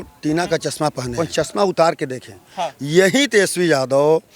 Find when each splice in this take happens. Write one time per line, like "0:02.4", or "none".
0:01.2